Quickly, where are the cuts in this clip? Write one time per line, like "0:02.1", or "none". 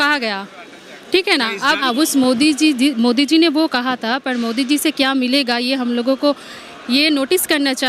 0:01.8